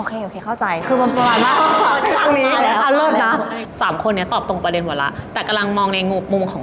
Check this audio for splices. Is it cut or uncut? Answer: uncut